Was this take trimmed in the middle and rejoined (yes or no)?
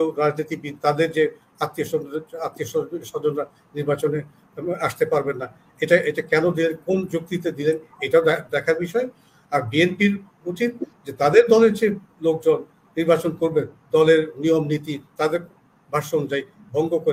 no